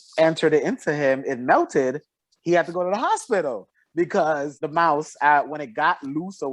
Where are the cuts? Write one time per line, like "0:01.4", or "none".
0:04.6